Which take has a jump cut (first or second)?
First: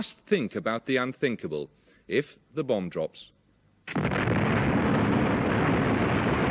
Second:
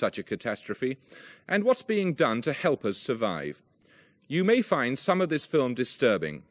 second